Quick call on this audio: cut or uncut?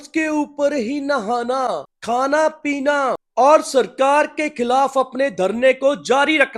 uncut